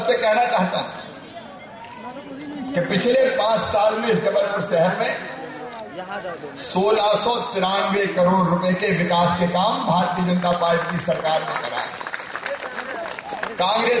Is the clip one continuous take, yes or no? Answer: yes